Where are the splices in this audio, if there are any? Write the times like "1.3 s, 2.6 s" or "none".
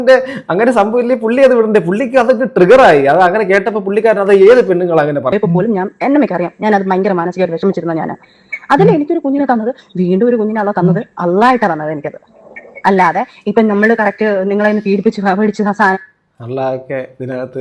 5.3 s